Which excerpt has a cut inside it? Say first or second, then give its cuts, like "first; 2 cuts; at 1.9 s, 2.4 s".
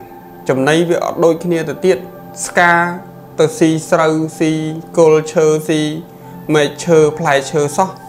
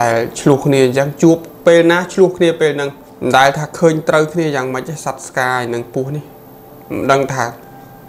second; 1 cut; at 3.0 s